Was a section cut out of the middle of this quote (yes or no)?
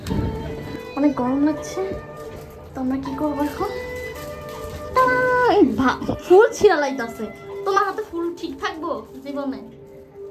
no